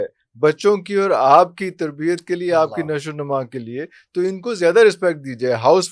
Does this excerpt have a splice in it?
no; 0 cuts

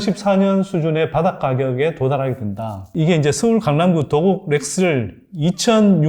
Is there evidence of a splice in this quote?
yes; 1 cut; at 2.9 s

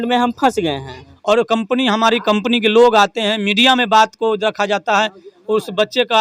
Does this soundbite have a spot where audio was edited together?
yes; 1 cut; at 1.1 s

